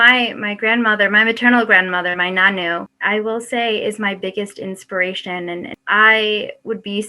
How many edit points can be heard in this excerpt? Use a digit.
1